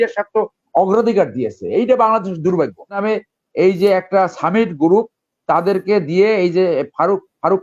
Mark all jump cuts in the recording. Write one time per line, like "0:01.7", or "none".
0:03.0